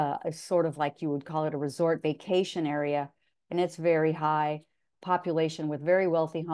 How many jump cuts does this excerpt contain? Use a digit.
0